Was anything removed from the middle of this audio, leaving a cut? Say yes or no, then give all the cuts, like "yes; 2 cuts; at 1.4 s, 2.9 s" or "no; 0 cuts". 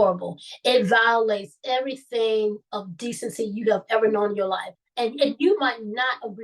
yes; 1 cut; at 4.7 s